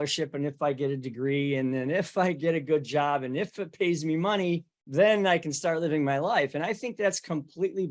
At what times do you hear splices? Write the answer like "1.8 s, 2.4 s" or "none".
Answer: 4.8 s